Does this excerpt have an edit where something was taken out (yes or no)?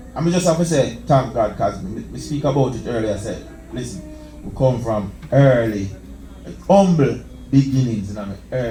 no